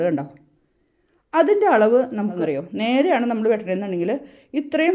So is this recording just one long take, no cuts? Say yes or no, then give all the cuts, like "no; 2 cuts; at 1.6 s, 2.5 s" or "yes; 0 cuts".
no; 1 cut; at 2.4 s